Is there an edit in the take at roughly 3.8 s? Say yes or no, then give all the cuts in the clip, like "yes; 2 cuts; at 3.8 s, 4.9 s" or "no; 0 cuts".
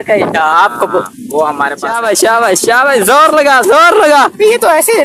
no; 1 cut; at 2.0 s